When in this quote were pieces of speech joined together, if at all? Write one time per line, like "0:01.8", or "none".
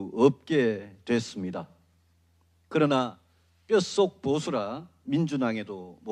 none